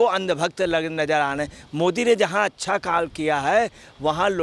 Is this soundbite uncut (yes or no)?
yes